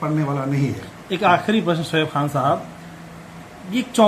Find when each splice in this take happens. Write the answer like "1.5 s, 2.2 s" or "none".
none